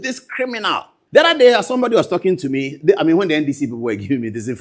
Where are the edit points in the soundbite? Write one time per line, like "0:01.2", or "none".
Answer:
0:00.9